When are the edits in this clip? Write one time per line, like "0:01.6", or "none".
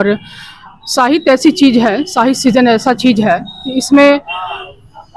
none

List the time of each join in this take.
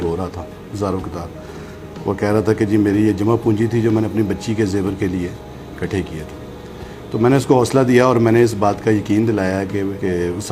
none

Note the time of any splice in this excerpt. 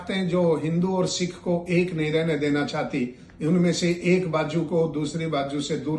none

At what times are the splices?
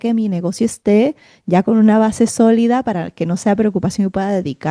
none

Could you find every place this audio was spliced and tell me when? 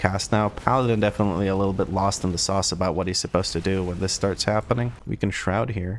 0:05.0

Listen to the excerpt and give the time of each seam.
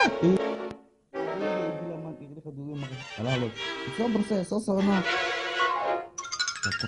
0:05.2

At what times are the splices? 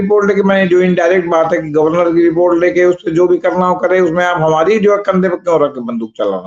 none

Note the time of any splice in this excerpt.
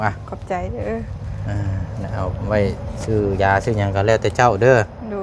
none

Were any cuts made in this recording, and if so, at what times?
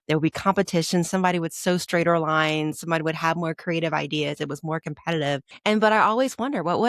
0:05.5

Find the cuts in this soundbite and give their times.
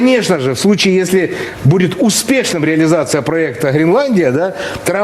none

